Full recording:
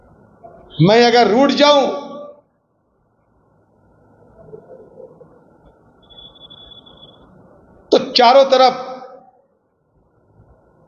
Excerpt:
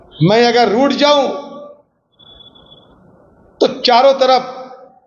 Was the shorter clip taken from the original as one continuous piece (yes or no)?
no